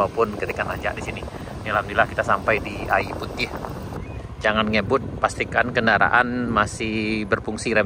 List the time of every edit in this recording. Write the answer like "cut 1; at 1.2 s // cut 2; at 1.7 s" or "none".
cut 1; at 3.9 s